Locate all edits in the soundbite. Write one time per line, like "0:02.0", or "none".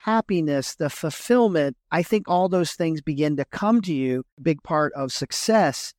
0:04.4